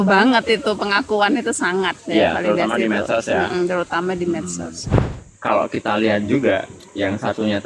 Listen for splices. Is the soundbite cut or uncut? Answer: cut